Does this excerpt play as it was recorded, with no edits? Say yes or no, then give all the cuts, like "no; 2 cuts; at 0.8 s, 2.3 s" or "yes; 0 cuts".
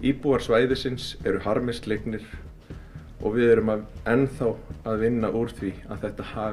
yes; 0 cuts